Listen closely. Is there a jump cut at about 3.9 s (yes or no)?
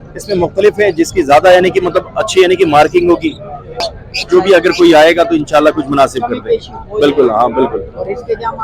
yes